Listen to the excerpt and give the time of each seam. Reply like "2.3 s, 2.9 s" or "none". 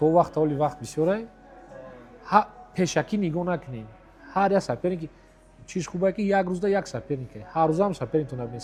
none

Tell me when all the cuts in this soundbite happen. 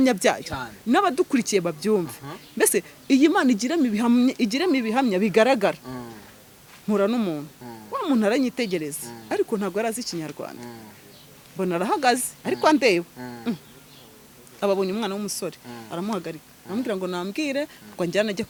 none

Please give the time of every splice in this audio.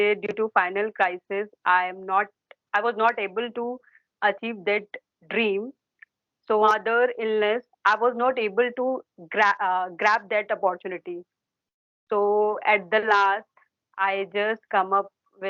6.7 s

